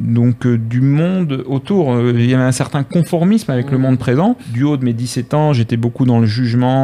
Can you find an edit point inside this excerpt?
yes; 1 cut; at 4.5 s

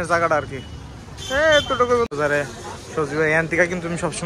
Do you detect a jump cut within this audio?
yes; 1 cut; at 2.1 s

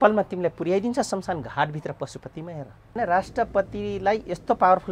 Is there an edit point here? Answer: yes; 1 cut; at 2.9 s

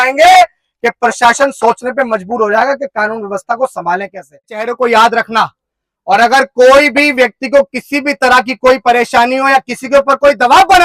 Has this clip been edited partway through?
yes; 1 cut; at 4.7 s

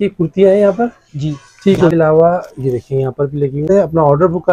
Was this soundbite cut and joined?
yes; 2 cuts; at 1.9 s, 3.7 s

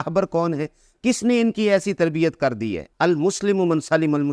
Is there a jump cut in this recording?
yes; 1 cut; at 2.8 s

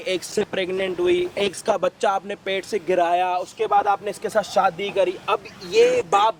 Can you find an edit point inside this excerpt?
no; 0 cuts

